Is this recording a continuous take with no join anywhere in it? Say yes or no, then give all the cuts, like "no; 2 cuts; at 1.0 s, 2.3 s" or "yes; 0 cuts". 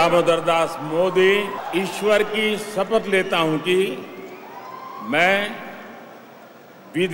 no; 1 cut; at 1.6 s